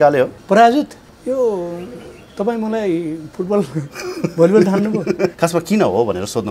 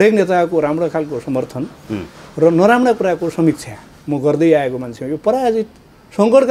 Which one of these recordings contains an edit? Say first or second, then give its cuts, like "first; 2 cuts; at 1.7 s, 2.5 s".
first; 2 cuts; at 1.1 s, 5.3 s